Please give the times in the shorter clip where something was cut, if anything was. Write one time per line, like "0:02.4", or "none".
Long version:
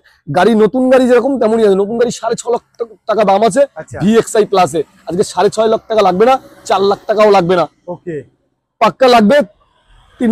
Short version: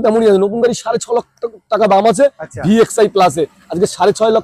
none